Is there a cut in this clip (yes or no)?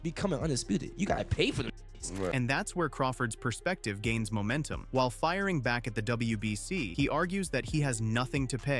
no